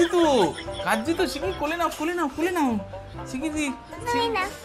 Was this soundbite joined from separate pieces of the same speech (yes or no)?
no